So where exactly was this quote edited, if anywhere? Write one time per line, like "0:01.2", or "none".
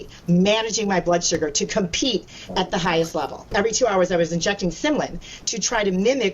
0:03.5